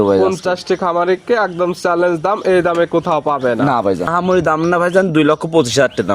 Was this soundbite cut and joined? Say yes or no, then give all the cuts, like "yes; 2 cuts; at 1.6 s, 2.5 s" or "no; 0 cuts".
yes; 1 cut; at 4.1 s